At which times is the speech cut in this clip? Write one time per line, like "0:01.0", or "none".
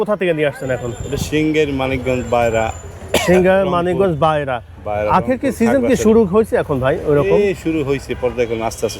none